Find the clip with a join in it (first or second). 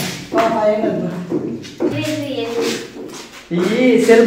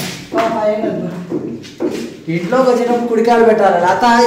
first